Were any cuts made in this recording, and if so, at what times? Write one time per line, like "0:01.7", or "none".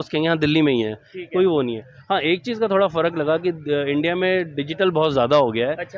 none